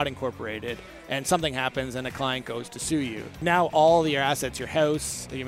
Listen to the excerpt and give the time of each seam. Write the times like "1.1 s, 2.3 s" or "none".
3.4 s